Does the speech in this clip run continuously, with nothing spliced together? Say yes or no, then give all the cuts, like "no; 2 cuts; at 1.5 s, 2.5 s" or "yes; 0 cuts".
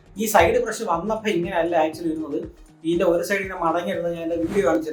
yes; 0 cuts